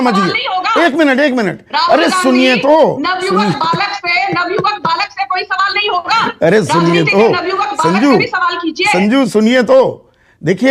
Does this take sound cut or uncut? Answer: uncut